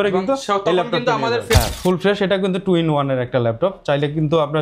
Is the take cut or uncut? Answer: cut